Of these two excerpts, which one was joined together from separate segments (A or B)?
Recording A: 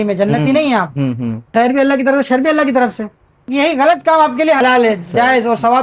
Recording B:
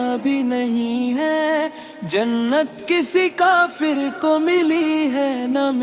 A